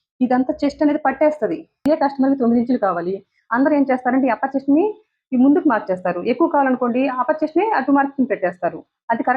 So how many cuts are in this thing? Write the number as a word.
one